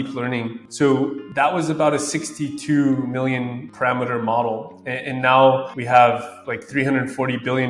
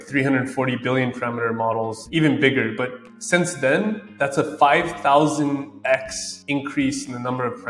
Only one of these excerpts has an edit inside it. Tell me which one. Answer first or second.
second